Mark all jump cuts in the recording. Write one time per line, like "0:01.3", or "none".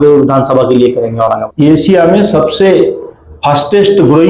0:01.4